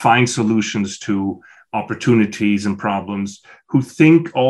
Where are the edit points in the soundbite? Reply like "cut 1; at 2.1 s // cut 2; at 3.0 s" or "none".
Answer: none